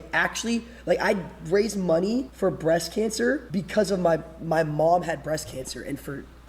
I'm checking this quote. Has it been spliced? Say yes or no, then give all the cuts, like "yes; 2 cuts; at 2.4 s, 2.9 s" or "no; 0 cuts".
yes; 2 cuts; at 2.3 s, 3.5 s